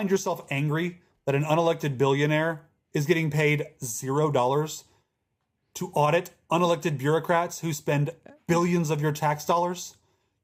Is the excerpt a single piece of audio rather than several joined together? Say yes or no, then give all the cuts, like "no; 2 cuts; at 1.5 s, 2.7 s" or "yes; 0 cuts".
yes; 0 cuts